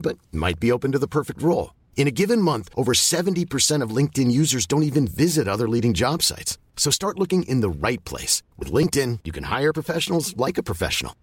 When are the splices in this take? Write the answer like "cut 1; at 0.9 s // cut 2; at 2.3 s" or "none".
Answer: none